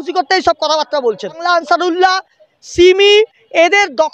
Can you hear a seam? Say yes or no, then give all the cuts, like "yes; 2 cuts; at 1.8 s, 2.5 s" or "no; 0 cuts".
yes; 1 cut; at 1.4 s